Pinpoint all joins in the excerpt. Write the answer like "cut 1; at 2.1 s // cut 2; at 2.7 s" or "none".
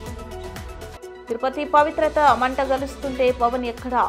cut 1; at 0.9 s